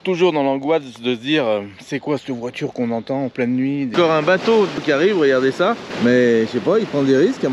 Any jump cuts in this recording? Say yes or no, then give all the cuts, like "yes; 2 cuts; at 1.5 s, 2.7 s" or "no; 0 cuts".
yes; 3 cuts; at 3.9 s, 4.8 s, 5.9 s